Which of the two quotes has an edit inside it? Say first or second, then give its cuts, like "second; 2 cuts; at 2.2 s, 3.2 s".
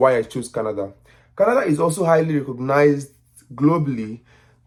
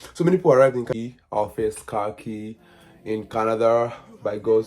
second; 1 cut; at 0.9 s